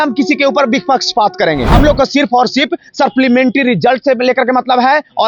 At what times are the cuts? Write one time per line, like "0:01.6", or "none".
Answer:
0:01.7